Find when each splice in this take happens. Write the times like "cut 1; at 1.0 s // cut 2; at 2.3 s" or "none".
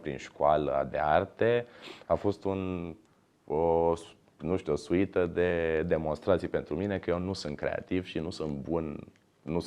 none